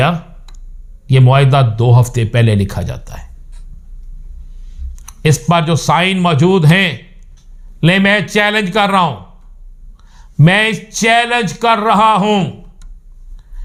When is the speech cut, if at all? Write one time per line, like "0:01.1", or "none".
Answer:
none

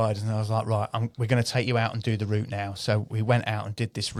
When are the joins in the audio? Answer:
none

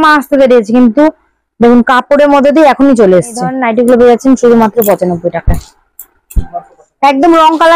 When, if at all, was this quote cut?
0:03.6

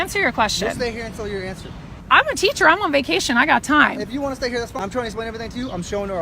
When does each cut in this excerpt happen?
0:02.0
0:04.8

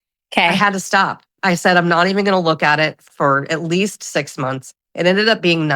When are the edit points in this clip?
0:01.3
0:03.0

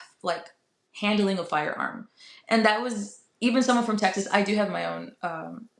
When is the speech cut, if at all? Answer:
none

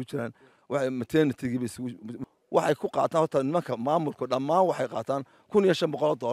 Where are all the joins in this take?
0:02.2

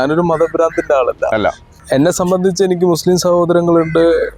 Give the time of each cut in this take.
0:01.7

